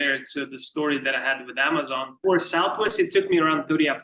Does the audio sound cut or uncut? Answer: cut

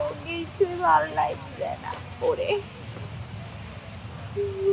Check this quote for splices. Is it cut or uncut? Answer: uncut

